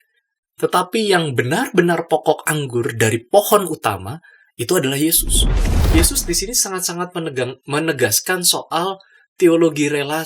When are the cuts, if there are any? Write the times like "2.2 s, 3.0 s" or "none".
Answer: 5.7 s